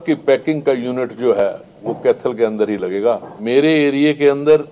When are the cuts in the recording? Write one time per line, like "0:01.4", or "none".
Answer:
0:03.3